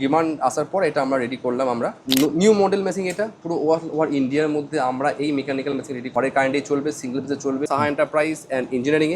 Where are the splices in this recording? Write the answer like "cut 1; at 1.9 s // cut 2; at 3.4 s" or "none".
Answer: cut 1; at 2.0 s // cut 2; at 6.1 s // cut 3; at 7.6 s